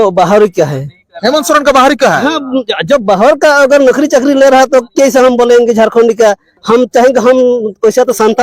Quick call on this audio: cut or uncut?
cut